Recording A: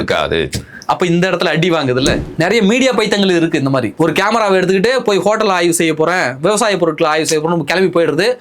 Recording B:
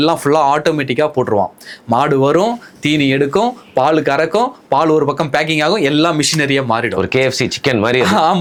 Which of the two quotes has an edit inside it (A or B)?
A